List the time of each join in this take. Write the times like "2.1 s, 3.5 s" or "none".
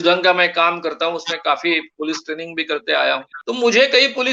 3.3 s